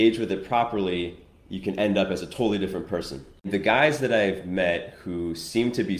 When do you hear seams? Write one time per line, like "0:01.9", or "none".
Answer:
0:03.5